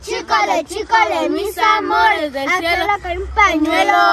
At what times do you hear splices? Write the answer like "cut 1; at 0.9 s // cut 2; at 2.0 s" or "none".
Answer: none